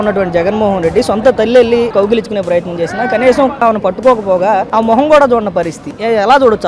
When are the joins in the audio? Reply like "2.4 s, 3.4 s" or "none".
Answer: 1.9 s, 3.6 s, 4.7 s, 5.9 s

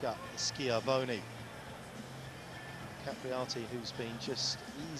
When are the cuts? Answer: none

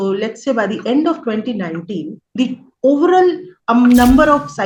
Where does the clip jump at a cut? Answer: 2.2 s, 3.5 s

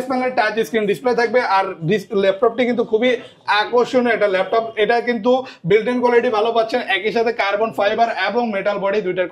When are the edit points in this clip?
none

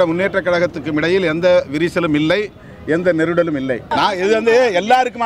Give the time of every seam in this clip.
3.9 s

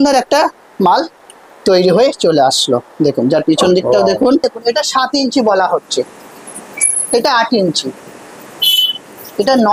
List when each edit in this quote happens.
4.4 s

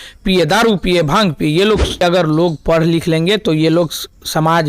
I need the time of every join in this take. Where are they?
2.0 s

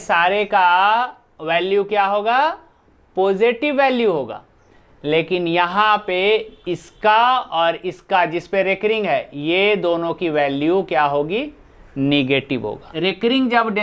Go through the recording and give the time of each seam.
12.9 s

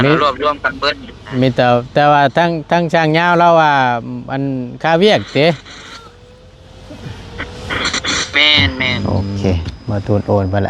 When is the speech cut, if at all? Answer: 9.2 s

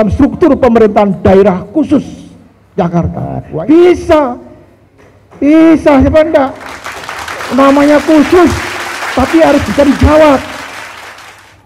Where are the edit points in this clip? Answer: 3.4 s

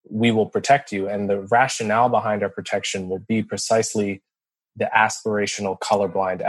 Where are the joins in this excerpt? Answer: none

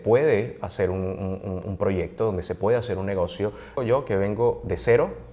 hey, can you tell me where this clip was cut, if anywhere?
3.8 s

